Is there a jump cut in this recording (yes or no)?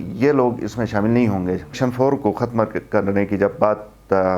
yes